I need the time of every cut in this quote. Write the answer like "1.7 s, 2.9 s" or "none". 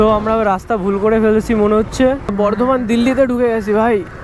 none